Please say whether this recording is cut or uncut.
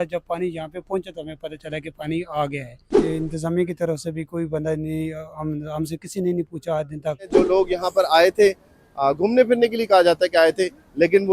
cut